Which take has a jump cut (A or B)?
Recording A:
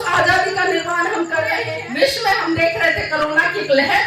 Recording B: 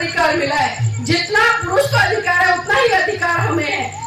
A